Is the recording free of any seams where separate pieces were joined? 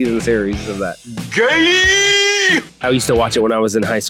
no; 2 cuts; at 1.1 s, 2.8 s

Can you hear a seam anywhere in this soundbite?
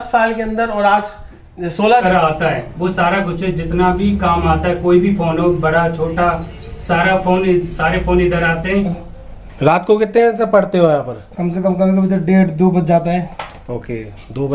yes; 2 cuts; at 2.0 s, 9.0 s

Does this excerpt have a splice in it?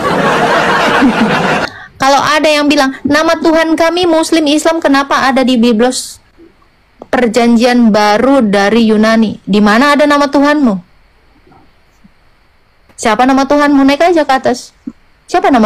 yes; 1 cut; at 1.7 s

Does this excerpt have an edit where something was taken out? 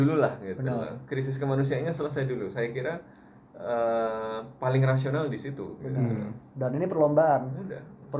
no; 0 cuts

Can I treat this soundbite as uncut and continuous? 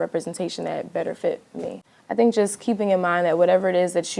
no; 1 cut; at 1.8 s

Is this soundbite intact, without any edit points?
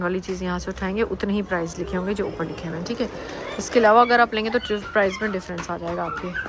yes; 0 cuts

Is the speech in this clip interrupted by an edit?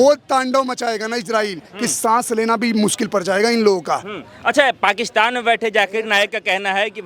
no; 0 cuts

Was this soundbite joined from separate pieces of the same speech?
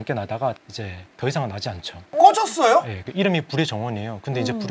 yes; 1 cut; at 3.0 s

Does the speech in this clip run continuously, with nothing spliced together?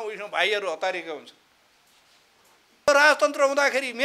no; 1 cut; at 2.9 s

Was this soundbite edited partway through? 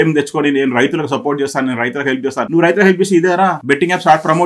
yes; 2 cuts; at 2.5 s, 3.6 s

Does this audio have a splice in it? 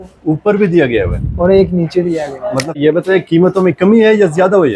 yes; 1 cut; at 2.8 s

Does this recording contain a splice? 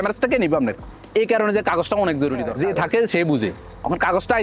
yes; 1 cut; at 2.5 s

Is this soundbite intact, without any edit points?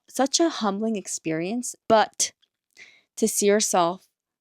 no; 1 cut; at 1.7 s

